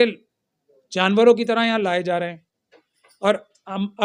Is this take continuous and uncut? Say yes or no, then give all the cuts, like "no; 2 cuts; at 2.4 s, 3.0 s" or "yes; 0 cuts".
yes; 0 cuts